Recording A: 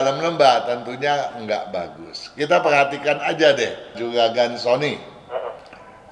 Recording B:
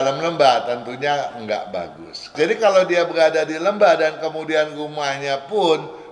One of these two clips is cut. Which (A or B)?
B